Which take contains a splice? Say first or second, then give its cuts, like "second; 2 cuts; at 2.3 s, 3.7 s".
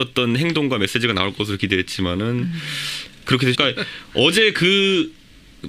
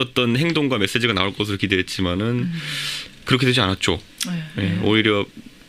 second; 1 cut; at 3.5 s